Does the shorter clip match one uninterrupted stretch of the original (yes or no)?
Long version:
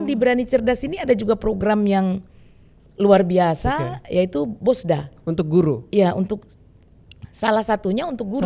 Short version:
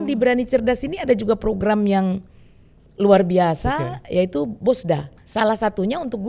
no